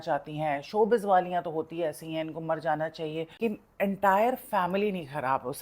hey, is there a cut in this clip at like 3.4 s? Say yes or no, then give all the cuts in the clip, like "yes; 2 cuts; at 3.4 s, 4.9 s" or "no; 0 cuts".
yes; 1 cut; at 3.4 s